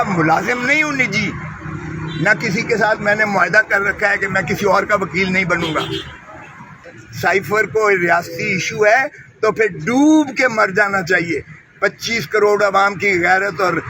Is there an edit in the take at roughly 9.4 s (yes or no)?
no